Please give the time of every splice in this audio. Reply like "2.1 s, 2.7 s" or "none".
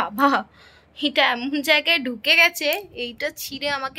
none